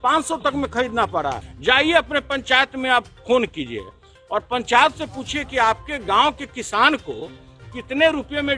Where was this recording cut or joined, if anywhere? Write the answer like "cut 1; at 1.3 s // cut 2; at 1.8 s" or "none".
cut 1; at 1.5 s